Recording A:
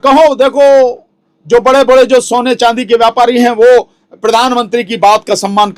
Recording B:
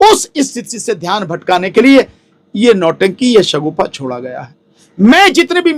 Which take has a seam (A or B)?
B